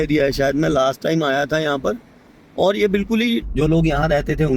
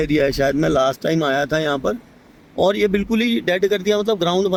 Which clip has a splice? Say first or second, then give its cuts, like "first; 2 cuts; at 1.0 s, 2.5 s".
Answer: first; 1 cut; at 3.4 s